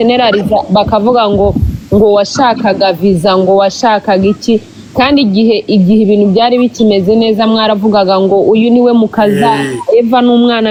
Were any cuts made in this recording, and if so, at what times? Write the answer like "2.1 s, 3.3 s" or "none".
none